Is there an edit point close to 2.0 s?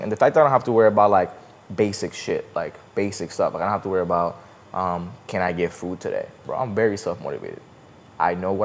no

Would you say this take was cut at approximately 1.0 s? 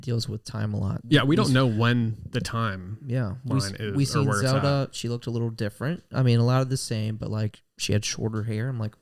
yes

